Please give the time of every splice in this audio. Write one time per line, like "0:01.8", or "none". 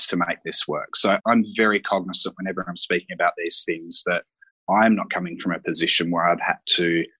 0:01.2

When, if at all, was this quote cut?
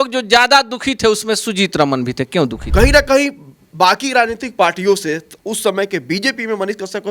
0:02.6

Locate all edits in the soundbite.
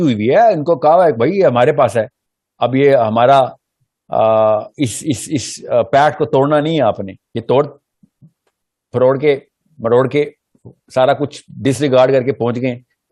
none

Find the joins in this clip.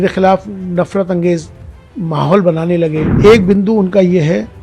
0:03.1

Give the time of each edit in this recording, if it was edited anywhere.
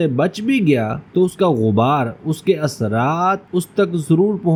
none

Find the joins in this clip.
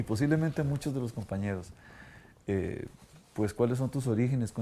0:02.5

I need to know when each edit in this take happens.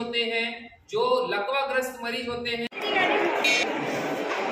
0:02.8

